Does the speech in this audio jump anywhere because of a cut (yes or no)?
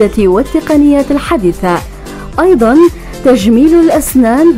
no